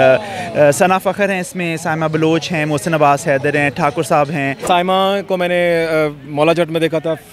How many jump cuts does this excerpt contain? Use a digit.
1